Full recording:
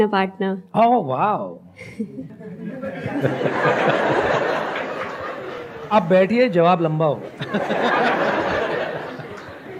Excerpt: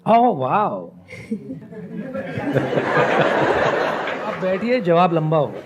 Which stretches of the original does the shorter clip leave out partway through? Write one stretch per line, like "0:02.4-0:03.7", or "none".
0:05.1-0:06.1